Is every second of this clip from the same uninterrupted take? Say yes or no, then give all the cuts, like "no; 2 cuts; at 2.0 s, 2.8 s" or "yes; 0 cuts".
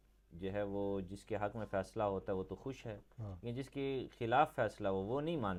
yes; 0 cuts